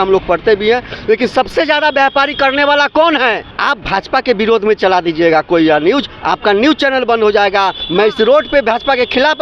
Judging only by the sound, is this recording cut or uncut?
cut